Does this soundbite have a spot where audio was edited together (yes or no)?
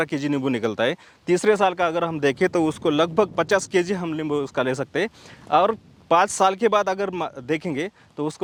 no